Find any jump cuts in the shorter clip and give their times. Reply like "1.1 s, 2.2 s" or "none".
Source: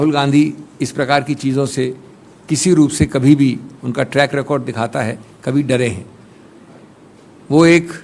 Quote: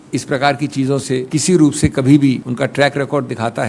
1.3 s, 2.5 s

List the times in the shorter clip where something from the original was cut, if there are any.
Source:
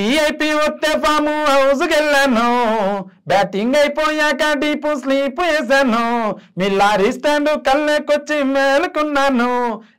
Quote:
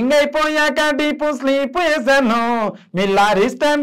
none

